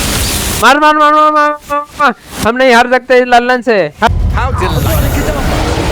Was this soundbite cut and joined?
yes; 1 cut; at 4.1 s

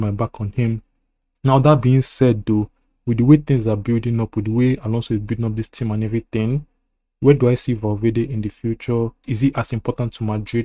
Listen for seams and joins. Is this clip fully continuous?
no; 1 cut; at 9.3 s

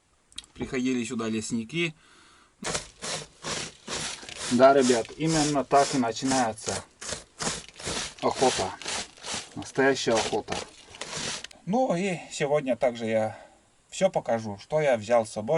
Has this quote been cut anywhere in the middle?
yes; 2 cuts; at 2.5 s, 11.5 s

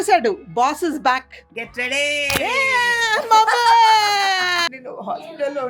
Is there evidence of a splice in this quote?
yes; 1 cut; at 4.7 s

